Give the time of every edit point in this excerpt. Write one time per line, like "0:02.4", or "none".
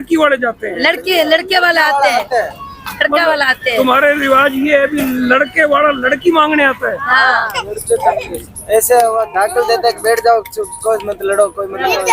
0:07.6